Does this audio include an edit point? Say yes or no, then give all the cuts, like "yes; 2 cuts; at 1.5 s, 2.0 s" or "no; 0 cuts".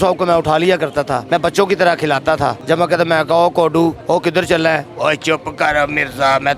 yes; 3 cuts; at 1.2 s, 2.6 s, 4.0 s